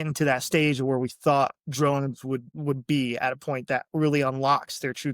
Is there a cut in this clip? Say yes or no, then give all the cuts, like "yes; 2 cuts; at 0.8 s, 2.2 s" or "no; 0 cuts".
yes; 1 cut; at 2.5 s